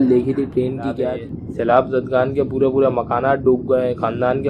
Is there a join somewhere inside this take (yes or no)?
yes